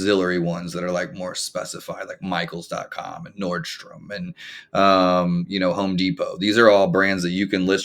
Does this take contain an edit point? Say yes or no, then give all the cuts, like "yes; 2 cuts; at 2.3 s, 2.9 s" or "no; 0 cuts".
no; 0 cuts